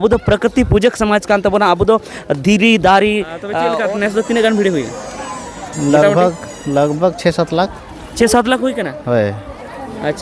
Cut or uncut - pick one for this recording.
cut